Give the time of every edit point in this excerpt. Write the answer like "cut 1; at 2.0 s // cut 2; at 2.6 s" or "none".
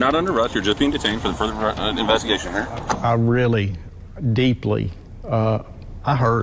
cut 1; at 3.0 s